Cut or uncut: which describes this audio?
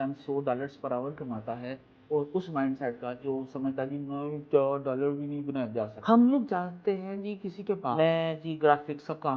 cut